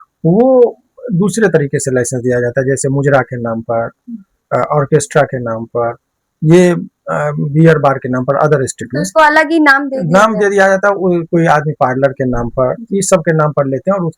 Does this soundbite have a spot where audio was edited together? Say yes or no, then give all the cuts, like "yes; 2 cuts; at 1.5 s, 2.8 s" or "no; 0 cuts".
no; 0 cuts